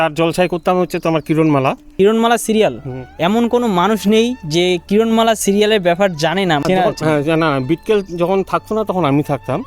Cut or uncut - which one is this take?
cut